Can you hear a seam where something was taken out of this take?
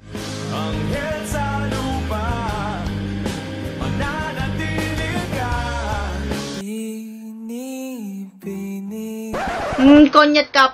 yes; 1 cut; at 9.7 s

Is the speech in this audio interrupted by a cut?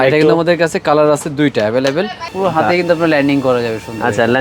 yes; 1 cut; at 2.3 s

